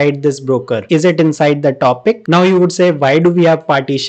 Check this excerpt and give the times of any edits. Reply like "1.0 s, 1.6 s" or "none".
2.2 s